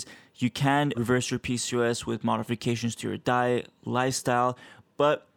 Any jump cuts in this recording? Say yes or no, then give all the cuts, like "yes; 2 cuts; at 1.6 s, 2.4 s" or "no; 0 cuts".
yes; 1 cut; at 0.9 s